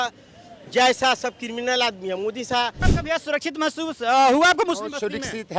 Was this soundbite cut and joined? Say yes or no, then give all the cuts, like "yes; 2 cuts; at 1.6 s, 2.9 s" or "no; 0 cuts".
yes; 1 cut; at 2.8 s